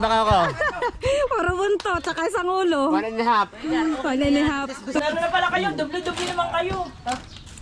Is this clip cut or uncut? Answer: cut